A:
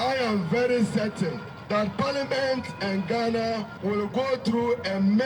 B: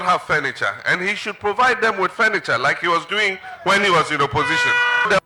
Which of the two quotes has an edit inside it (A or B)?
A